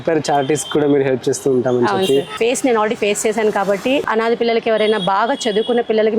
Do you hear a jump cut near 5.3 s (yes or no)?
no